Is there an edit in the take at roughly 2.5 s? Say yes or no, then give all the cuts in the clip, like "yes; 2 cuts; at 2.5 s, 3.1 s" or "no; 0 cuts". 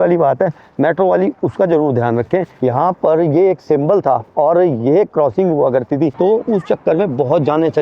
yes; 2 cuts; at 2.5 s, 6.1 s